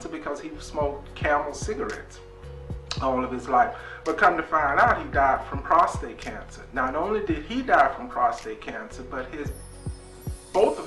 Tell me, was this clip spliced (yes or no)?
no